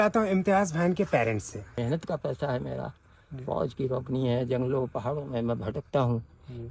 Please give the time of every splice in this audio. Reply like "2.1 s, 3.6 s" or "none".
1.7 s